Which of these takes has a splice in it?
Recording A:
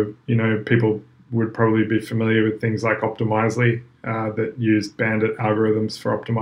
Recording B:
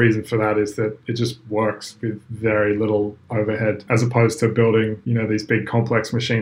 B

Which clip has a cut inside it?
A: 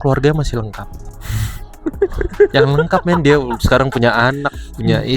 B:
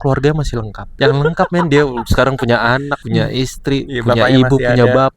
B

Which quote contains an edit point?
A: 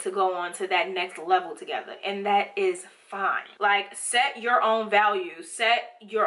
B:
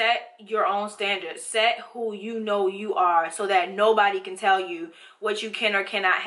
A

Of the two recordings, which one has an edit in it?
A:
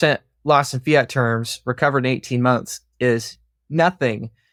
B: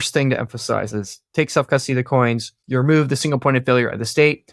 B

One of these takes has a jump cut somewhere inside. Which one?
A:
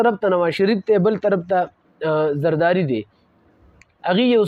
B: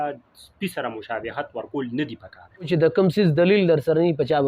B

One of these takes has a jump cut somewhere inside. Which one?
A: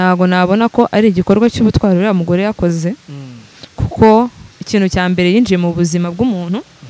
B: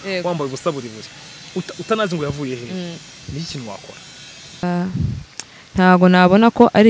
B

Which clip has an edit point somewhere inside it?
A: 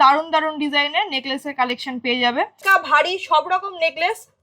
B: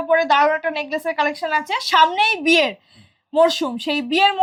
A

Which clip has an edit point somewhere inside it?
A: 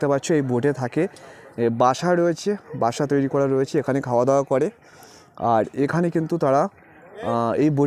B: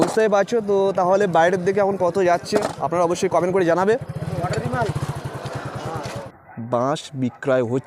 B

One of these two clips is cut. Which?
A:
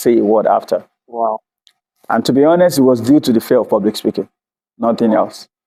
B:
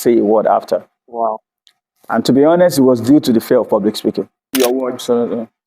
B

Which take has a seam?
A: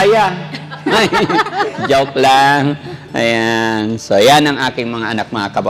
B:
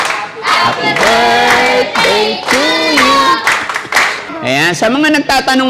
B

